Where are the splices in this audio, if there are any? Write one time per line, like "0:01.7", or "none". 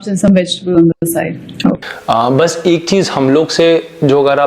0:01.9